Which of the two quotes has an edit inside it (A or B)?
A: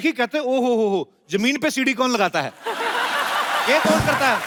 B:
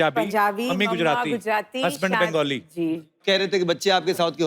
B